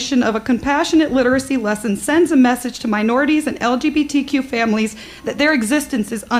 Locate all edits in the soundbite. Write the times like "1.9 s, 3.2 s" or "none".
none